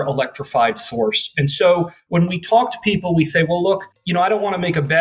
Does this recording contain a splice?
yes; 1 cut; at 2.0 s

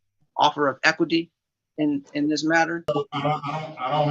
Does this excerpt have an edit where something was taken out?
yes; 1 cut; at 2.8 s

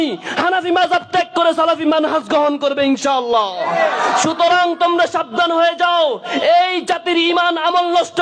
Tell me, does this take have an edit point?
no; 0 cuts

